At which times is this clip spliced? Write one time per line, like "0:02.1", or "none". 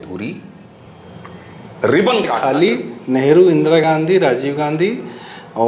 0:02.4